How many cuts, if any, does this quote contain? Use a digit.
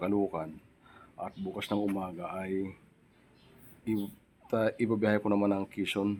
0